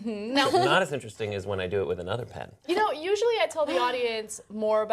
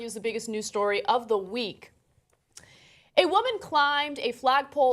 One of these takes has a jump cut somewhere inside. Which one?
second; 1 cut; at 3.7 s

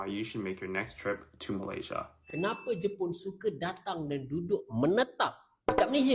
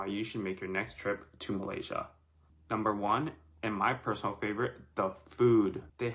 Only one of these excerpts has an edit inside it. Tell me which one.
first; 1 cut; at 2.2 s

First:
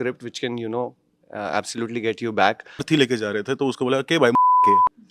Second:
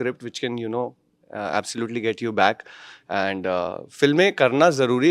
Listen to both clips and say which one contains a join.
first; 1 cut; at 2.8 s

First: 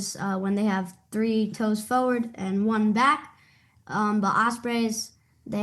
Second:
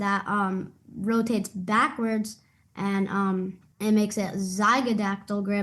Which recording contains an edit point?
second; 1 cut; at 3.6 s

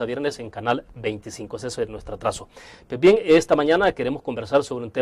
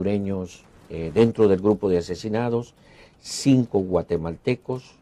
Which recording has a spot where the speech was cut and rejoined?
first; 1 cut; at 1.4 s

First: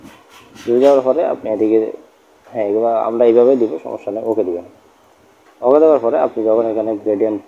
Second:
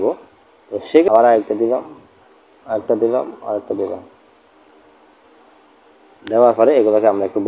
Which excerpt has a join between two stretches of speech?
second; 1 cut; at 1.1 s

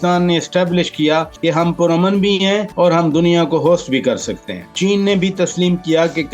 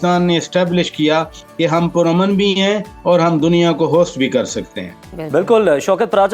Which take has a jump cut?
first; 3 cuts; at 1.3 s, 2.7 s, 4.7 s

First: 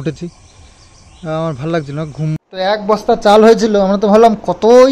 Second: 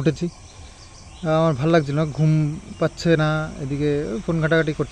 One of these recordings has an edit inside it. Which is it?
first; 1 cut; at 2.4 s

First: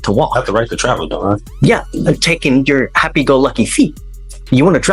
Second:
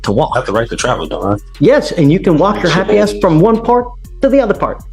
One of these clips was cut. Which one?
second; 1 cut; at 1.5 s

